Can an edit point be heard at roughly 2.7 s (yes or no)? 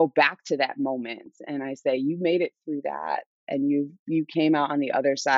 no